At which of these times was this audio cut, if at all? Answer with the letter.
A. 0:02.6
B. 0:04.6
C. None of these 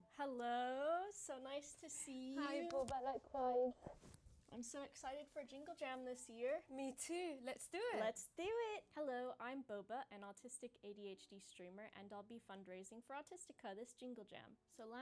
C